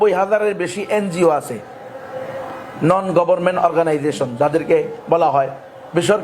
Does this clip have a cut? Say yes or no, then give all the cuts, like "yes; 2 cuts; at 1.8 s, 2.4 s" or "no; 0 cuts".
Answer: no; 0 cuts